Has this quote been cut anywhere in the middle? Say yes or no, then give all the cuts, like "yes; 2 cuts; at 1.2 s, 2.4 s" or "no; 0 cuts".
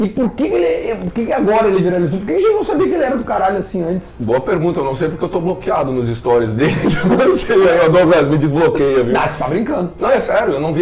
no; 0 cuts